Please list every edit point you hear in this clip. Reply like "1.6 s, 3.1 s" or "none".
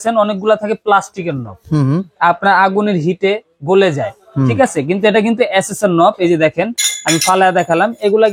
none